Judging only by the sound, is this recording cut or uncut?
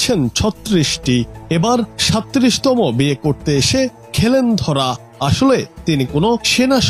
uncut